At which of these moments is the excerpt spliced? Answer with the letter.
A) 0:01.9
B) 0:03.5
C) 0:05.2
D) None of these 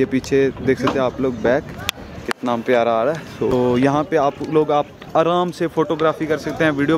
B